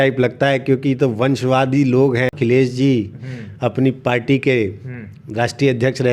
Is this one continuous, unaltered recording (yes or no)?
no